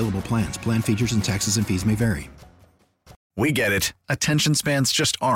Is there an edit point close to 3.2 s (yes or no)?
yes